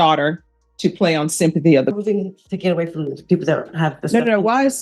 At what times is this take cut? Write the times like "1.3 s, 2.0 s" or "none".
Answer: 2.0 s